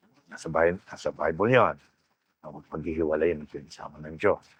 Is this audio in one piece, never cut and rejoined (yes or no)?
yes